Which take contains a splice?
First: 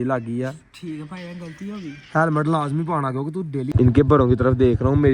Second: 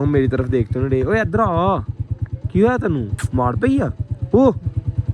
first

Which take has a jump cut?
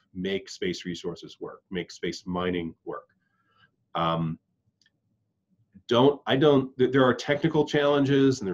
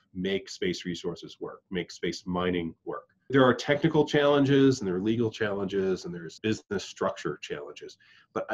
second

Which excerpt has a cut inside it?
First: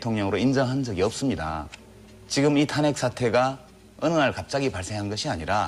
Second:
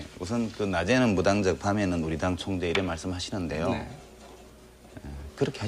first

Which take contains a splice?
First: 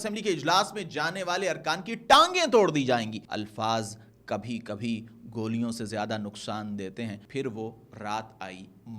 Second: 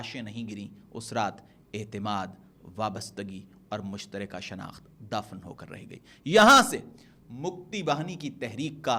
first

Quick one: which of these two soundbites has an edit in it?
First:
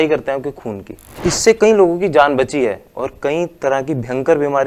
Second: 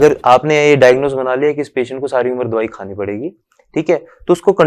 first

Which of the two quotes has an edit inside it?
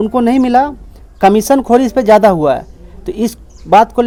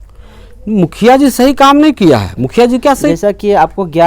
second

